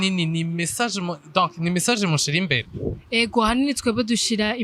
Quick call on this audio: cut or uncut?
uncut